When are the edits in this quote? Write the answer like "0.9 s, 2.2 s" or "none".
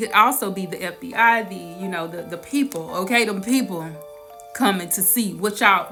none